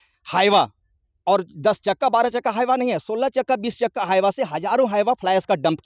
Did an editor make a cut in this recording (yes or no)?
no